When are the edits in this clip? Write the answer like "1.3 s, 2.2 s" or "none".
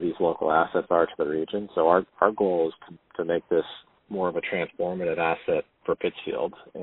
none